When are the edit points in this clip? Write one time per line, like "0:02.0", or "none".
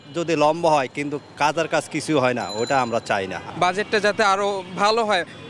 none